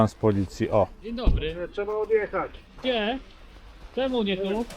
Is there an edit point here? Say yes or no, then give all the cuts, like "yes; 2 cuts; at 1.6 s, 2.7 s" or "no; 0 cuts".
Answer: yes; 2 cuts; at 1.0 s, 2.6 s